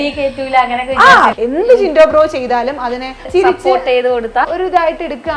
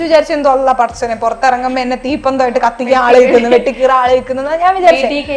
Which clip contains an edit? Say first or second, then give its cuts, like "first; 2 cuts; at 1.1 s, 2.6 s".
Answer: first; 3 cuts; at 1.3 s, 3.2 s, 4.5 s